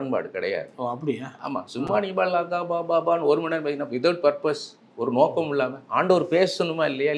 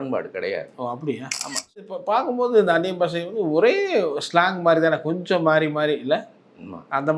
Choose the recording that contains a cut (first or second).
second